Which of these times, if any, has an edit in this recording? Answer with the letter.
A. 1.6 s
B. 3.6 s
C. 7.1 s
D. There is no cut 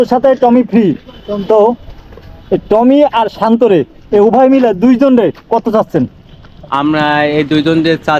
D